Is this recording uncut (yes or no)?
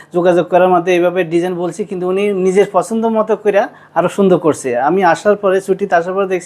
yes